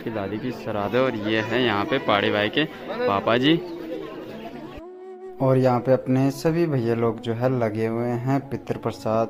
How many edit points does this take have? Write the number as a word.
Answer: zero